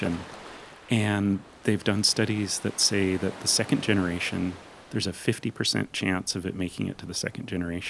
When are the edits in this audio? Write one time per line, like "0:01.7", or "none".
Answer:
0:01.5